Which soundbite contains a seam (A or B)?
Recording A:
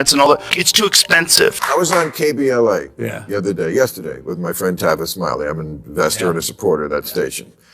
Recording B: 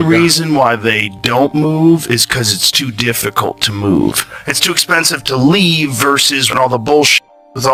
A